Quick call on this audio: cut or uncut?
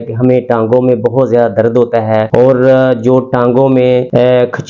uncut